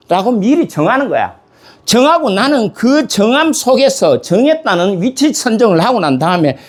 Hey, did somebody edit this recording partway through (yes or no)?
no